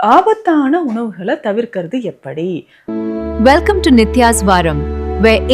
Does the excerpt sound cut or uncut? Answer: cut